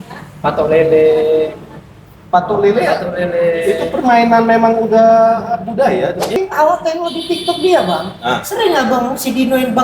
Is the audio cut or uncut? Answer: cut